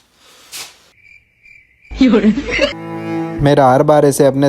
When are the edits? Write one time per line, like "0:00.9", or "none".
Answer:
0:02.8